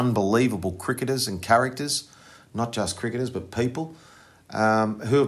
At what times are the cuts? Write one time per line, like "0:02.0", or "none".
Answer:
none